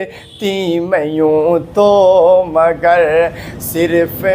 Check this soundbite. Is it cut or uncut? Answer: uncut